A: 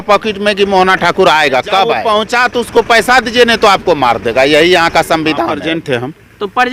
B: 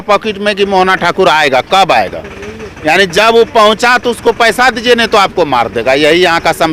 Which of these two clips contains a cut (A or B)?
A